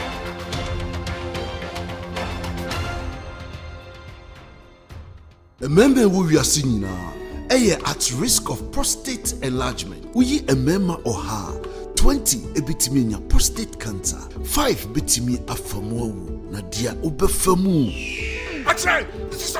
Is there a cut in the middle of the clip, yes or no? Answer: yes